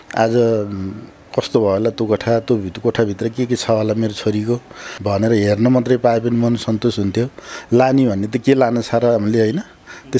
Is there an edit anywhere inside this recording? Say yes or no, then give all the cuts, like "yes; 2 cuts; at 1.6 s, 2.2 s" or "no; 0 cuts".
yes; 1 cut; at 4.9 s